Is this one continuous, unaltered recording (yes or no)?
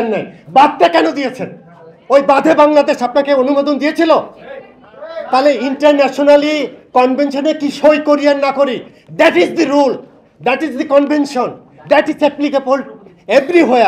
yes